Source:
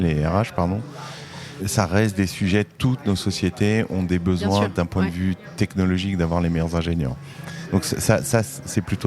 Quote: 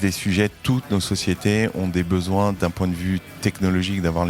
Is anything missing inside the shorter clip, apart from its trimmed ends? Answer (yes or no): no